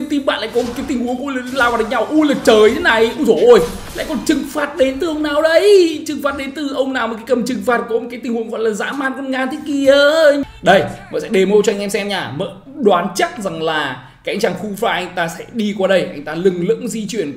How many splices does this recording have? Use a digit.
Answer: 1